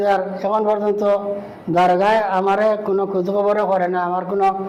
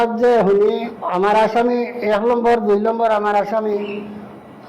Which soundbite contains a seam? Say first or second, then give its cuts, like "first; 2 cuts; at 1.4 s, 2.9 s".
second; 1 cut; at 0.9 s